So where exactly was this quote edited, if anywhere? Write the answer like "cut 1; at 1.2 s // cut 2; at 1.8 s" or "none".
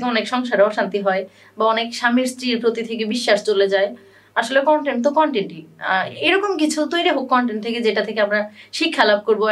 none